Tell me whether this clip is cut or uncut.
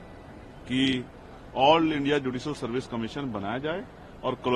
uncut